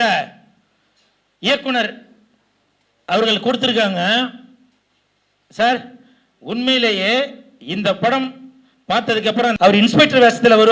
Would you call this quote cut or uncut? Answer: cut